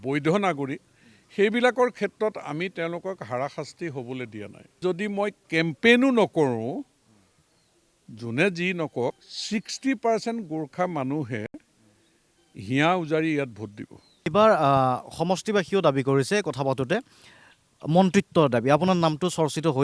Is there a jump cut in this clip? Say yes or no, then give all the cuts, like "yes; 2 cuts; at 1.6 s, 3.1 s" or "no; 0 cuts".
yes; 2 cuts; at 4.8 s, 14.3 s